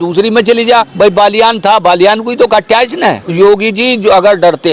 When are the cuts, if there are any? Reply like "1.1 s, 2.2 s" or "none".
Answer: 0.9 s, 3.3 s